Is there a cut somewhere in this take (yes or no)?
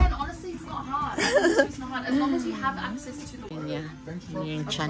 no